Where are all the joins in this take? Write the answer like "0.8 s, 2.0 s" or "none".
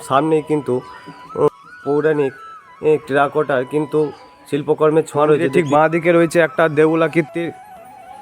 1.5 s, 5.5 s